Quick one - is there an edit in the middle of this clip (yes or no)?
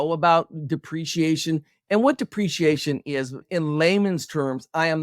yes